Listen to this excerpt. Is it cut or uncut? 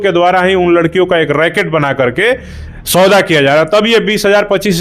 uncut